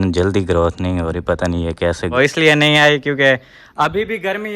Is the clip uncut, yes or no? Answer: no